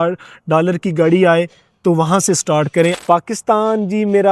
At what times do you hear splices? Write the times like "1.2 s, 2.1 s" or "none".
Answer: 3.0 s